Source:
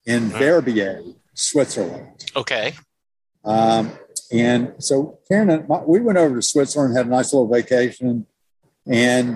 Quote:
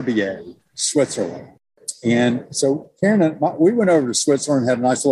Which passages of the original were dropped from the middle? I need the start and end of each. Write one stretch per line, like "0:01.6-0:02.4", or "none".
0:02.3-0:03.9